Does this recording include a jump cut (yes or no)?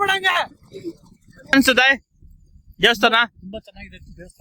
yes